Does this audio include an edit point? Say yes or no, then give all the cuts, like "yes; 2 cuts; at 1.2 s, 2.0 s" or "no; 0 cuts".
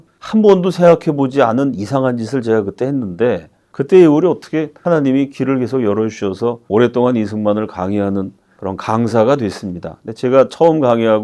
no; 0 cuts